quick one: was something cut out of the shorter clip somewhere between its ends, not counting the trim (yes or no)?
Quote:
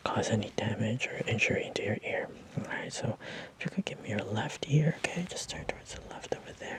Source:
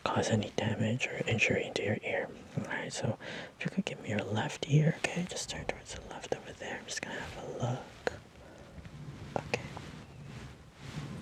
no